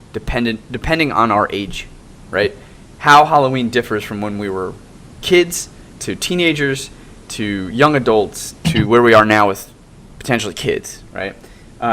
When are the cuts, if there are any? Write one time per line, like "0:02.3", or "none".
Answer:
0:05.9